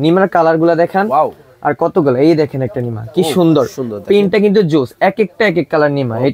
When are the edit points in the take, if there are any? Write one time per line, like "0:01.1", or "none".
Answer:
none